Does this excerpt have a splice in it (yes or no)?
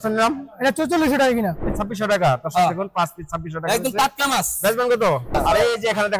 yes